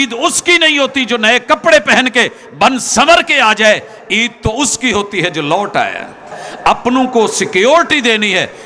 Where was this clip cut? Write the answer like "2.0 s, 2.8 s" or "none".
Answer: 6.4 s